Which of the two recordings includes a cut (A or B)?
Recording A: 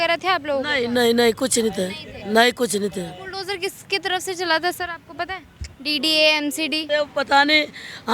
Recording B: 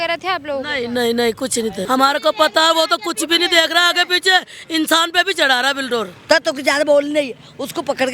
B